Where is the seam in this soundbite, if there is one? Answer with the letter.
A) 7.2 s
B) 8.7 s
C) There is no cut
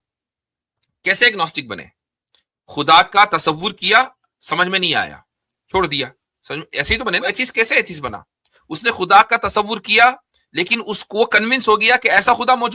A